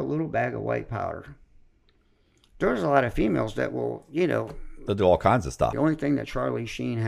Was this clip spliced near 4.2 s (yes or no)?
no